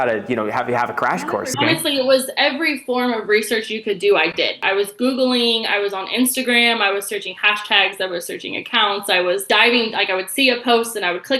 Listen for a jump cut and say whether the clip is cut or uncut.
cut